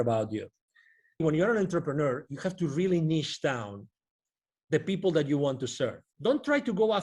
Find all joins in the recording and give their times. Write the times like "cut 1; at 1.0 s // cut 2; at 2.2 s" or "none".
cut 1; at 1.2 s // cut 2; at 6.1 s